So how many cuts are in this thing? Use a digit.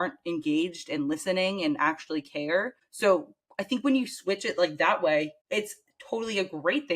2